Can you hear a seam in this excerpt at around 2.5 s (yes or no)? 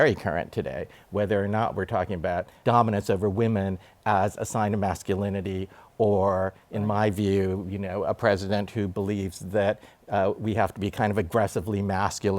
yes